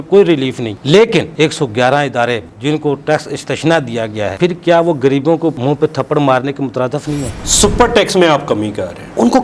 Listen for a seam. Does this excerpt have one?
yes; 4 cuts; at 1.3 s, 2.5 s, 4.3 s, 7.3 s

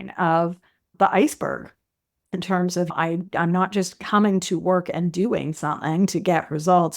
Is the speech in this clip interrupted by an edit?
yes; 1 cut; at 2.9 s

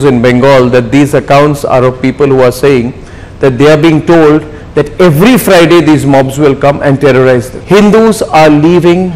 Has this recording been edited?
yes; 1 cut; at 7.5 s

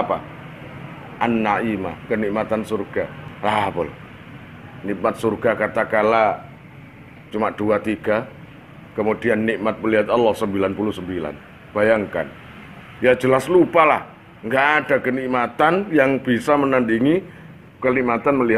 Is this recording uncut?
no; 1 cut; at 3.2 s

